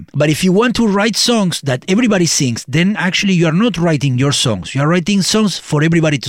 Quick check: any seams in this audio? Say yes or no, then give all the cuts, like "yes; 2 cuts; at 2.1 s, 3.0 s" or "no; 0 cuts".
no; 0 cuts